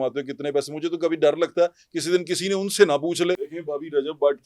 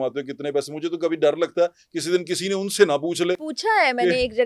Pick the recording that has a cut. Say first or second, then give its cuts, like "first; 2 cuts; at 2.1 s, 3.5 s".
first; 1 cut; at 3.5 s